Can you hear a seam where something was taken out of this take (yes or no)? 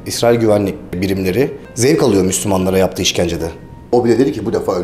yes